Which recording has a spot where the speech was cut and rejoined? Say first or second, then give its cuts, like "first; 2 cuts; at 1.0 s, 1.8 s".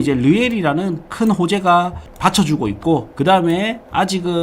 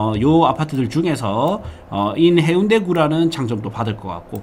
first; 2 cuts; at 2.0 s, 3.1 s